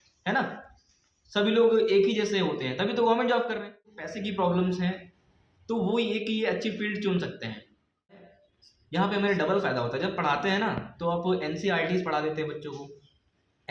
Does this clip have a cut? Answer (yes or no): yes